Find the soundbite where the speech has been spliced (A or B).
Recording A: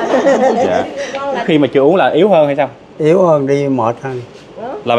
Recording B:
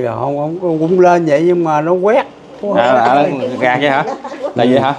A